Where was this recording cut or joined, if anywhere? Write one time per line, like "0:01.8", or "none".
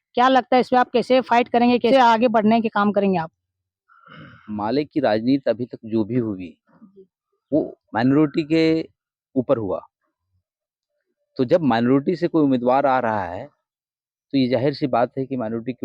0:01.9